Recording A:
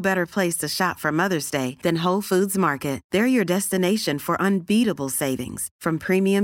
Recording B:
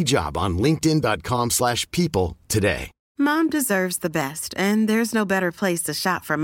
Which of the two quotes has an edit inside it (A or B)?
B